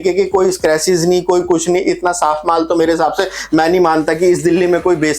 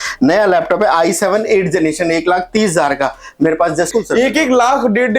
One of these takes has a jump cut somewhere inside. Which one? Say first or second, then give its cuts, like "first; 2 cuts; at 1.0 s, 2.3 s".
second; 1 cut; at 3.9 s